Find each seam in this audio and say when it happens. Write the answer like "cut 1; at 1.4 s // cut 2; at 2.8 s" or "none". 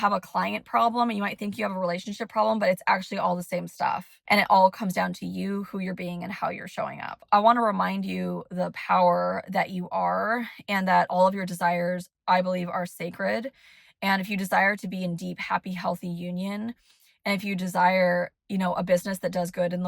cut 1; at 4.1 s // cut 2; at 7.2 s